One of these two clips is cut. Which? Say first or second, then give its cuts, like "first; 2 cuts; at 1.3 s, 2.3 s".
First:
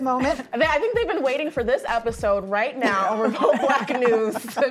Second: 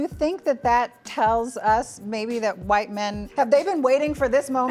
second; 1 cut; at 3.2 s